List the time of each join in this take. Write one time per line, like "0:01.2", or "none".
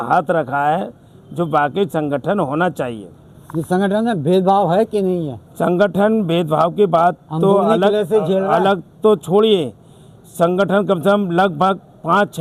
none